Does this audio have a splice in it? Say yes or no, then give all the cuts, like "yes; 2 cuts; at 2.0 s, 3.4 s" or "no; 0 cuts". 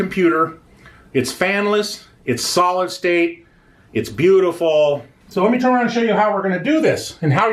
yes; 1 cut; at 5.2 s